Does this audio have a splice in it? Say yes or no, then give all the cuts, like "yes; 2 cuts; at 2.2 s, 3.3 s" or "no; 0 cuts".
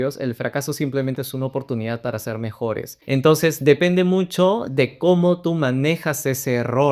no; 0 cuts